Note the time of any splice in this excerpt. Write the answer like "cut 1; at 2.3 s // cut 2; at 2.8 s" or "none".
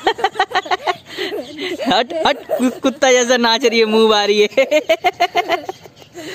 none